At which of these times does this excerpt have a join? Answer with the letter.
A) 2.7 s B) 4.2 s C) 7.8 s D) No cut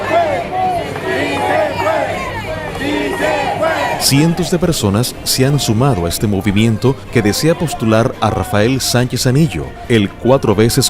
A